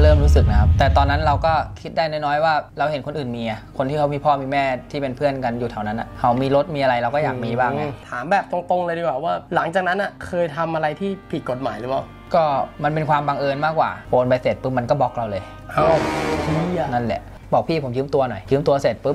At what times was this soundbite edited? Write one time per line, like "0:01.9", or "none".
0:07.9
0:14.0
0:17.3